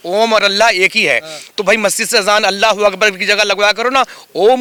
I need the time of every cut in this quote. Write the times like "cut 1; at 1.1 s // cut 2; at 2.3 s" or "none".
none

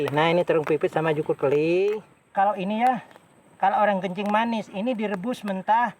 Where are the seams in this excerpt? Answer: cut 1; at 2.2 s

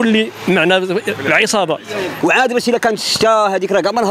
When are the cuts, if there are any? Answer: cut 1; at 2.1 s

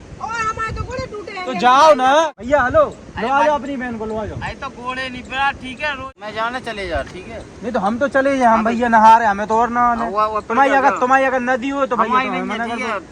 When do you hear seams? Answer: cut 1; at 2.4 s // cut 2; at 6.2 s

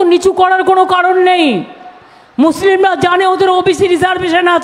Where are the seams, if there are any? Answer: none

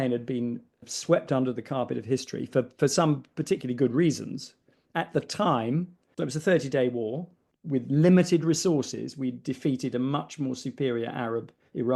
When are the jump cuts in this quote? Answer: cut 1; at 0.9 s // cut 2; at 6.1 s

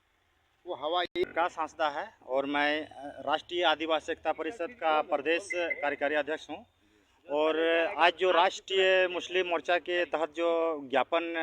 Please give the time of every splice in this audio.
cut 1; at 1.1 s

